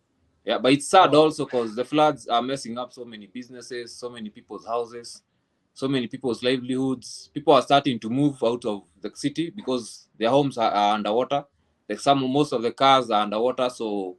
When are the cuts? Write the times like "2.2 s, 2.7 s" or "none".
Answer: none